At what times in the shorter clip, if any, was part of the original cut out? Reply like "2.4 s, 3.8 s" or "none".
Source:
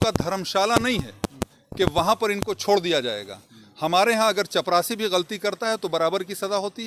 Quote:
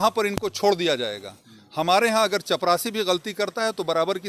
none